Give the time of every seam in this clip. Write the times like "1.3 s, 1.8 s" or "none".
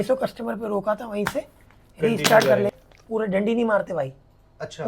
2.7 s